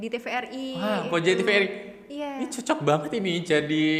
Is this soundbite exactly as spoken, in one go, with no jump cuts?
yes; 0 cuts

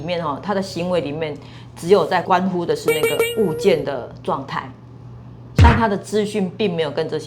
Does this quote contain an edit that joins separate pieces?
yes; 1 cut; at 5.4 s

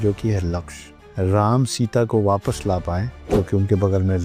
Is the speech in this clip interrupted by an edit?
yes; 2 cuts; at 1.0 s, 3.1 s

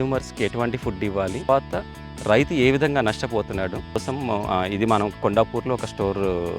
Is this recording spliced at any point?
yes; 2 cuts; at 1.5 s, 4.0 s

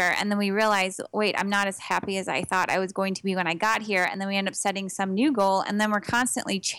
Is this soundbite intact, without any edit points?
yes; 0 cuts

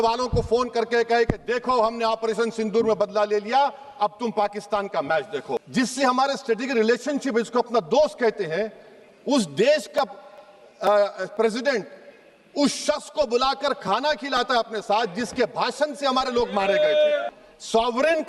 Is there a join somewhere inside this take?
yes; 2 cuts; at 5.7 s, 17.3 s

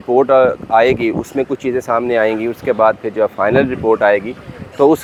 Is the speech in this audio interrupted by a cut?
no; 0 cuts

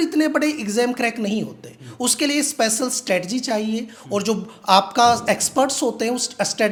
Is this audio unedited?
yes; 0 cuts

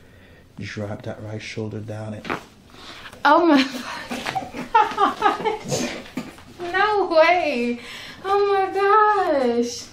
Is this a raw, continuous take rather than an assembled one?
yes; 0 cuts

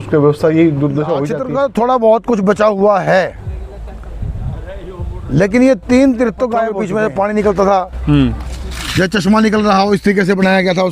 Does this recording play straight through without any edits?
no; 2 cuts; at 1.3 s, 6.8 s

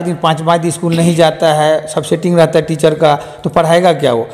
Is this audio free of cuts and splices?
yes; 0 cuts

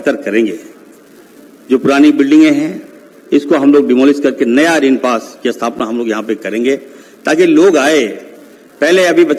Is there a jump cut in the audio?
no; 0 cuts

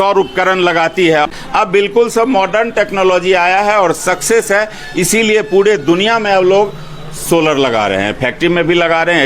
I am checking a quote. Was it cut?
yes; 1 cut; at 1.3 s

